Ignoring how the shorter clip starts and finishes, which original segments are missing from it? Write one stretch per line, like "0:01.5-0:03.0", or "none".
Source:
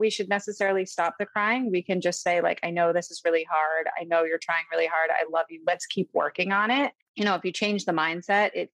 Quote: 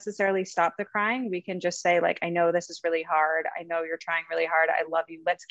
none